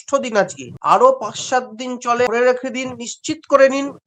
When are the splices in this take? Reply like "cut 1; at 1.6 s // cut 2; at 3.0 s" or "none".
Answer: cut 1; at 2.3 s